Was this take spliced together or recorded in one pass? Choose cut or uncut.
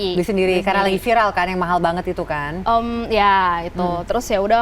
uncut